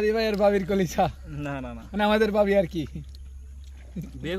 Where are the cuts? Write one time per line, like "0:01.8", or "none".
none